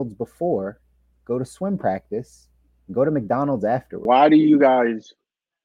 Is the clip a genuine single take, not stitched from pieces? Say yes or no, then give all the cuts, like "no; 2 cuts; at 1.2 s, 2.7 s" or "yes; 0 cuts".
no; 1 cut; at 4.0 s